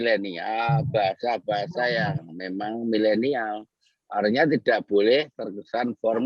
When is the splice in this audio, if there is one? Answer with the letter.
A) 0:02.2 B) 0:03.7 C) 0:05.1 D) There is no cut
A